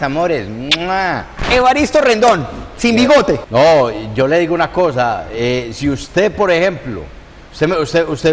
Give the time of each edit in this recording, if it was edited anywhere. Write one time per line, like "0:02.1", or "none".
0:01.4